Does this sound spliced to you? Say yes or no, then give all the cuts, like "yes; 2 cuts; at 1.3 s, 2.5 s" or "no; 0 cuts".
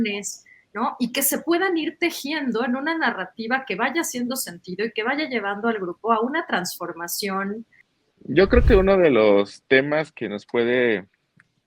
yes; 1 cut; at 8.1 s